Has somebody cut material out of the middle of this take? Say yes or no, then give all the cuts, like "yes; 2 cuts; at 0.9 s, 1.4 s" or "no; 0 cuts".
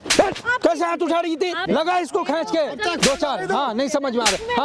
yes; 1 cut; at 1.7 s